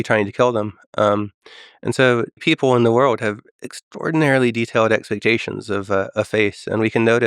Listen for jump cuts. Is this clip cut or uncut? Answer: cut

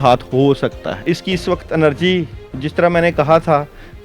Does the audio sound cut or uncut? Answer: cut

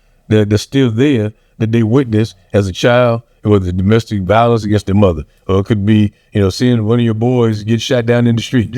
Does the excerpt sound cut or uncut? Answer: uncut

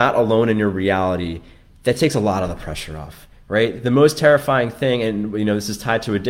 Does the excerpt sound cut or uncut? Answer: uncut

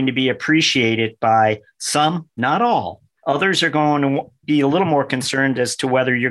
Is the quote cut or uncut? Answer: uncut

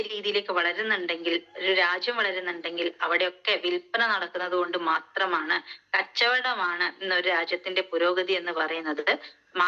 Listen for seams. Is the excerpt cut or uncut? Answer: uncut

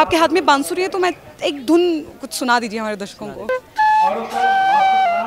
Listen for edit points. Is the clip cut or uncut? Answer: cut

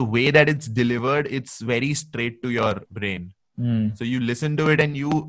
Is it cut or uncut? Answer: cut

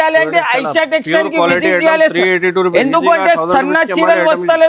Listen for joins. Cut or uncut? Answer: uncut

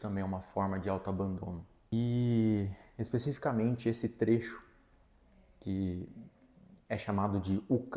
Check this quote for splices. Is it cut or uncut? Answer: cut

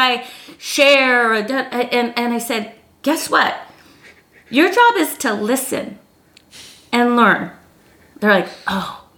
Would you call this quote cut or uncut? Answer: uncut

